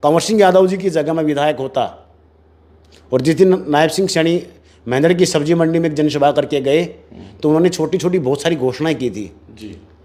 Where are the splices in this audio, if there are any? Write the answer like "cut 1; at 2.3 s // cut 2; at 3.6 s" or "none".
none